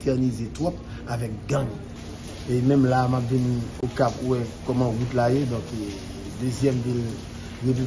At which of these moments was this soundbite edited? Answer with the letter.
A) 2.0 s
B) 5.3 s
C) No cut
A